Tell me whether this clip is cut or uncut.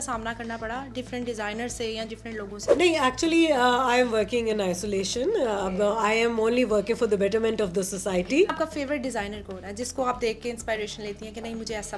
cut